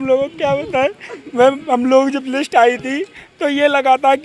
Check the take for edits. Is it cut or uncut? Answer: uncut